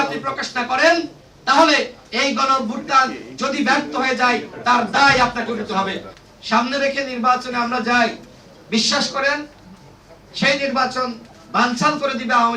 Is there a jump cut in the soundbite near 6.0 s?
yes; 2 cuts; at 6.0 s, 11.3 s

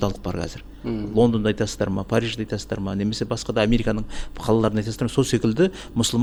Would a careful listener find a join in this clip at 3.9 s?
no; 0 cuts

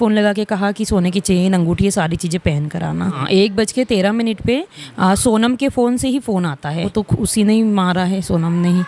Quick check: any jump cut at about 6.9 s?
yes; 2 cuts; at 3.2 s, 6.9 s

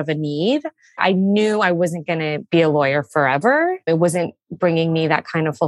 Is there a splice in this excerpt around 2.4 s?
yes; 3 cuts; at 1.0 s, 2.4 s, 3.8 s

